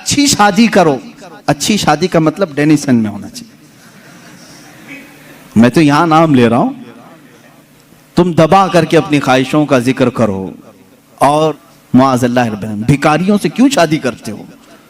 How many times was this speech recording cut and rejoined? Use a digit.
1